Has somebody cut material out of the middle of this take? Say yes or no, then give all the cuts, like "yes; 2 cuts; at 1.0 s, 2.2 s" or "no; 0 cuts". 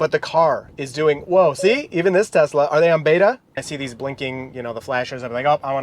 yes; 1 cut; at 3.7 s